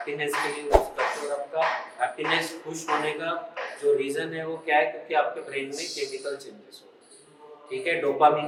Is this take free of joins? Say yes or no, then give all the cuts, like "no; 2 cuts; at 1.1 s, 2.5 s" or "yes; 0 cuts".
yes; 0 cuts